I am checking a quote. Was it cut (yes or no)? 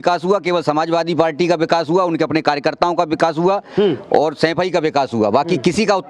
no